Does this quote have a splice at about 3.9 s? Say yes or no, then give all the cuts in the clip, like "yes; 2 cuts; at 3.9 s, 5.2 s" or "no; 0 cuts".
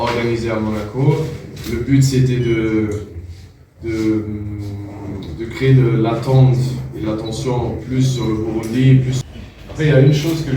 no; 1 cut; at 9.2 s